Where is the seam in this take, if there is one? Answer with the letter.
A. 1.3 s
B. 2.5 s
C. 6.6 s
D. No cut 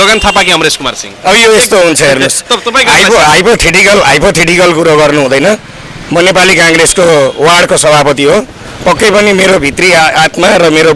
D